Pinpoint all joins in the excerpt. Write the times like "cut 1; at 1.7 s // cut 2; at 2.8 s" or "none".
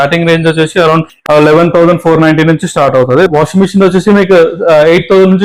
cut 1; at 3.3 s